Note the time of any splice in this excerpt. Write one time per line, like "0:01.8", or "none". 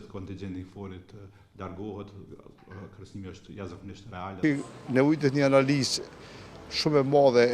0:04.4